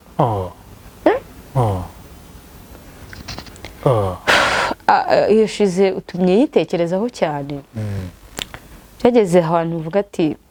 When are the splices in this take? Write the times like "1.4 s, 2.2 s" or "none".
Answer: none